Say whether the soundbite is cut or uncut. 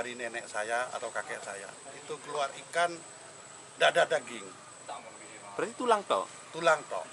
uncut